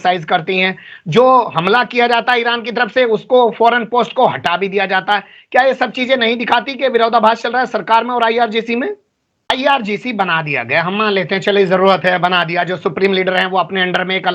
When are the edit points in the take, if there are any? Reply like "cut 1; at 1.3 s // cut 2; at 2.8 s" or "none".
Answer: cut 1; at 9.5 s